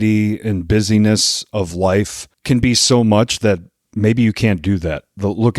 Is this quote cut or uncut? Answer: cut